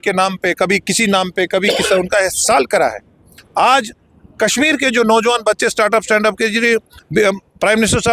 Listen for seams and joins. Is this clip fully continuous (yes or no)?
yes